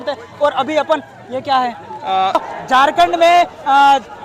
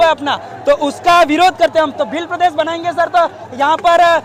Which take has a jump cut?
first; 1 cut; at 2.4 s

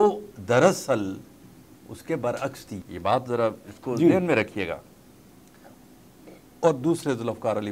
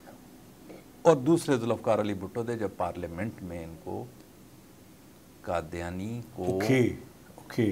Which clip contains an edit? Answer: first; 1 cut; at 2.8 s

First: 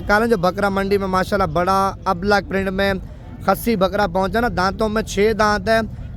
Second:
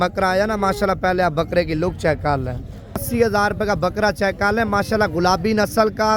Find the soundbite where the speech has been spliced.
second; 1 cut; at 3.1 s

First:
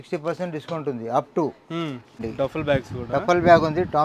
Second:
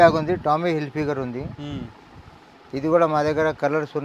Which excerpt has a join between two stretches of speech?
first; 1 cut; at 2.2 s

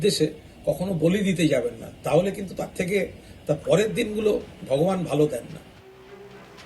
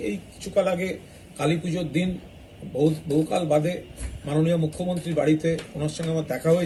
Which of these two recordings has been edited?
first; 1 cut; at 5.7 s

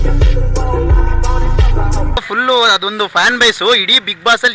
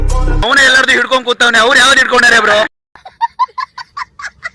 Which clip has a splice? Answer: first; 2 cuts; at 1.0 s, 2.2 s

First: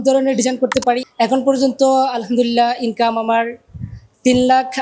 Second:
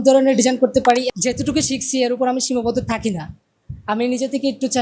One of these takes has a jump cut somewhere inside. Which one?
second; 1 cut; at 1.1 s

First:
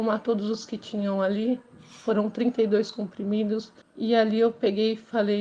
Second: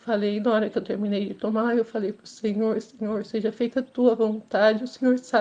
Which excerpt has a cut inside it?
first; 1 cut; at 3.8 s

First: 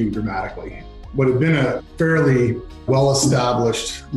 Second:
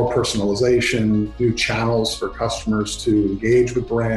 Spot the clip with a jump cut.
first; 3 cuts; at 1.0 s, 1.9 s, 2.9 s

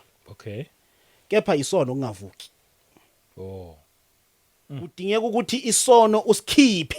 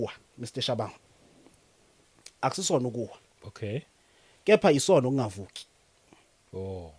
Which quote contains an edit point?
first; 1 cut; at 4.9 s

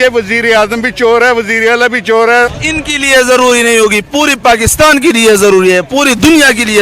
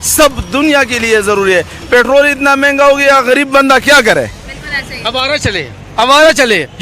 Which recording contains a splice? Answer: first; 1 cut; at 2.5 s

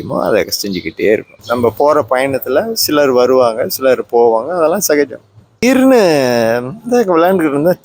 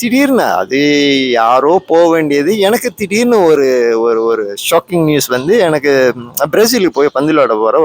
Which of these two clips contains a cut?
first; 2 cuts; at 1.3 s, 5.6 s

